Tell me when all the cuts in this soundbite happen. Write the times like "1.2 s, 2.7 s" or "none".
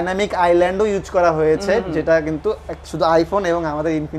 none